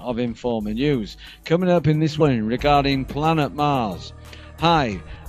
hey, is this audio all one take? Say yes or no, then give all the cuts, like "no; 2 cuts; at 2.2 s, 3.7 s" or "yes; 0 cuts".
yes; 0 cuts